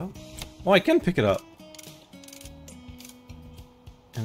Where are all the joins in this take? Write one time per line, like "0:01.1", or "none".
none